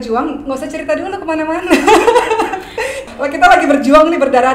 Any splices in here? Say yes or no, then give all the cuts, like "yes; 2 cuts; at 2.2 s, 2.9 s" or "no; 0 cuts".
yes; 1 cut; at 3.0 s